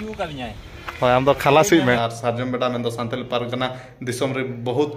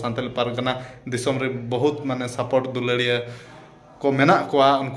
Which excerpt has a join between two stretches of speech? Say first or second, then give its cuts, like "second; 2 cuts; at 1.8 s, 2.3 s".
first; 1 cut; at 2.0 s